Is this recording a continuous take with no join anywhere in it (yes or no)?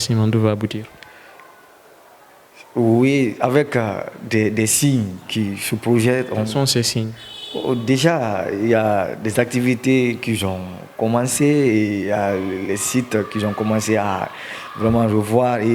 yes